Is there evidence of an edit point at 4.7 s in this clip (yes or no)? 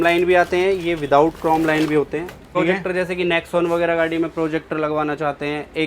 no